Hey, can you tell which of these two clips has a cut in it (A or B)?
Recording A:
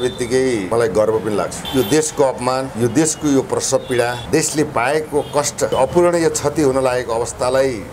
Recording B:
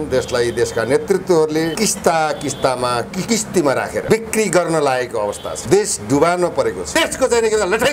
B